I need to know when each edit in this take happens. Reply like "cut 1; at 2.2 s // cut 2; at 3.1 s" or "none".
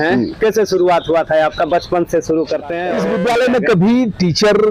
cut 1; at 3.0 s